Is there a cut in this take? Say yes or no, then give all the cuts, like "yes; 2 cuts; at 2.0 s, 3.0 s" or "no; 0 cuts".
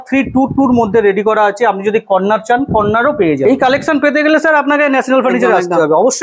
yes; 1 cut; at 3.4 s